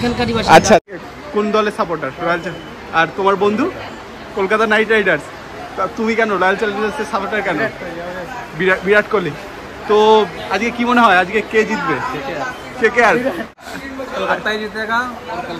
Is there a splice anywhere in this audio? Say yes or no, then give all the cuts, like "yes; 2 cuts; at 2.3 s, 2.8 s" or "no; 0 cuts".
yes; 2 cuts; at 0.8 s, 13.6 s